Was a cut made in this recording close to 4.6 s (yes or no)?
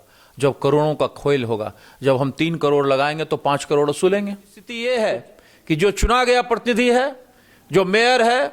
yes